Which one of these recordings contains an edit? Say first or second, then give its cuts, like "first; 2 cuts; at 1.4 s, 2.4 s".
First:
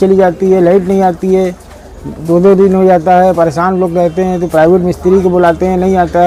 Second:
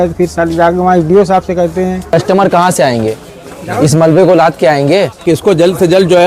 second; 2 cuts; at 2.1 s, 5.2 s